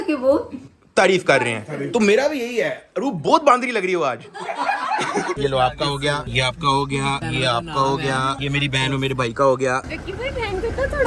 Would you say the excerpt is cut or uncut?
cut